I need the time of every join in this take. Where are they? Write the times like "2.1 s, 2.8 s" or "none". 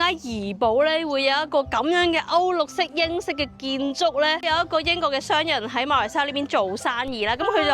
4.4 s